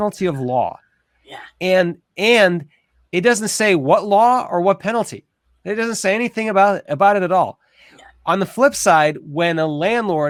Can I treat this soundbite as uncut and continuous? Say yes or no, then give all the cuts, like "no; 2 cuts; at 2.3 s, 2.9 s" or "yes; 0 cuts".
yes; 0 cuts